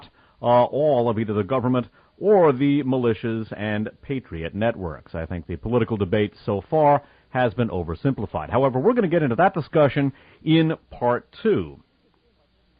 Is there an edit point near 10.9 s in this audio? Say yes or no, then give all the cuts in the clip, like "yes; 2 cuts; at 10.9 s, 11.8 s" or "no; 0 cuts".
no; 0 cuts